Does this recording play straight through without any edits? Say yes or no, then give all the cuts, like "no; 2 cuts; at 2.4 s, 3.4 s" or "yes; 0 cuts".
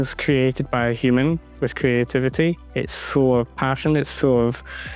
yes; 0 cuts